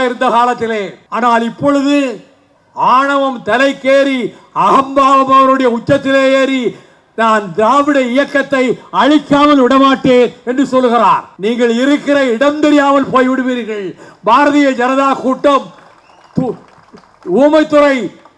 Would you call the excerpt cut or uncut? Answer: cut